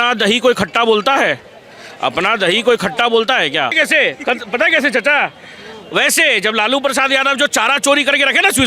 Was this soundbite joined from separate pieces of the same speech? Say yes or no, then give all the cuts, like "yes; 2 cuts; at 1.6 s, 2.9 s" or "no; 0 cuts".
yes; 1 cut; at 3.7 s